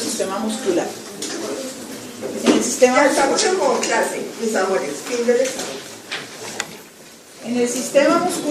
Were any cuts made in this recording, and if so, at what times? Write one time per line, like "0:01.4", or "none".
none